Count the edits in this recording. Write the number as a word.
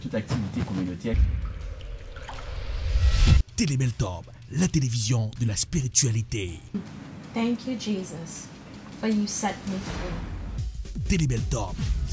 zero